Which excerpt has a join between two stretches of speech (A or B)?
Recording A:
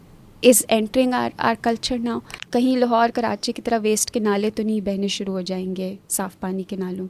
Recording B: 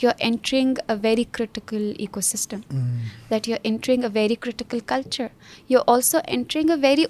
A